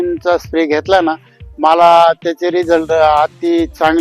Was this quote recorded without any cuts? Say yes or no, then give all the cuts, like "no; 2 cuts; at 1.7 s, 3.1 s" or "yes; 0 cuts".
yes; 0 cuts